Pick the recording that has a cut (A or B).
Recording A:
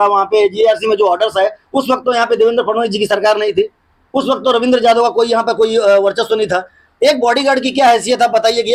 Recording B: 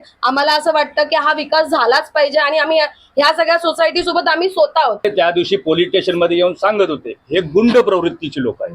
B